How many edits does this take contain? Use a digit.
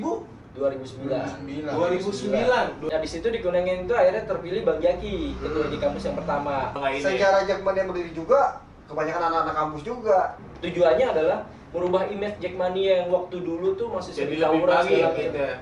3